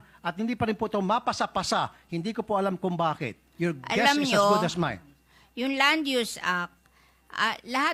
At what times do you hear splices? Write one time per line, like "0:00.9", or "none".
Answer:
none